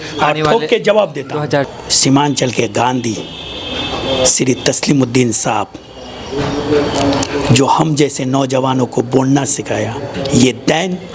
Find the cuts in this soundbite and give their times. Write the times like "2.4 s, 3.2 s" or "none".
1.7 s, 10.1 s